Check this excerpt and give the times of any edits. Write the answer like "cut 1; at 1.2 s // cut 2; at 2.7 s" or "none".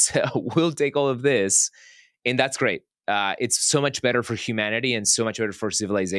none